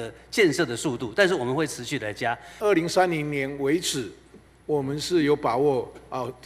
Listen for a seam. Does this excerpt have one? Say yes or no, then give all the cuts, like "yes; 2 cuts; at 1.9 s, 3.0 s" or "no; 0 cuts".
yes; 1 cut; at 2.5 s